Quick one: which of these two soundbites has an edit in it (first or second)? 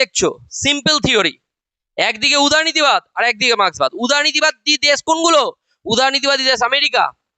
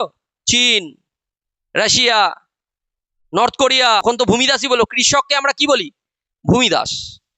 second